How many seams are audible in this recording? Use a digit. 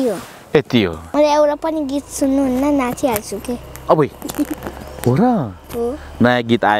1